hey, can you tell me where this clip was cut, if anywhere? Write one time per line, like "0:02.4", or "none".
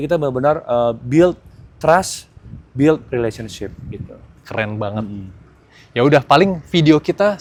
none